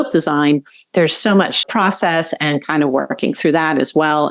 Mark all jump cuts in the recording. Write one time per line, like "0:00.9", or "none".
0:01.7